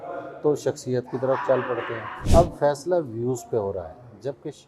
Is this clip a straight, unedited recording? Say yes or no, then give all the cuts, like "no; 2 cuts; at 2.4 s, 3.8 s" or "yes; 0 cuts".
no; 1 cut; at 2.2 s